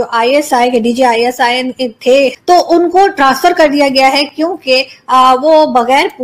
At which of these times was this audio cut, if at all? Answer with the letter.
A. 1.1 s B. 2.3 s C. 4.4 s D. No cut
B